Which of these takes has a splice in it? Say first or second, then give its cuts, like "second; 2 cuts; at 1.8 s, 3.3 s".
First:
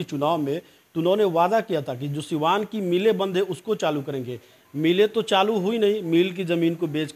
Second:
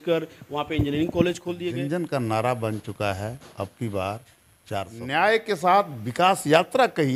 second; 2 cuts; at 1.6 s, 5.0 s